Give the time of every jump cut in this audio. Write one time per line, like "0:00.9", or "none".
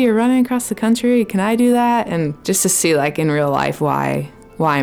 0:02.4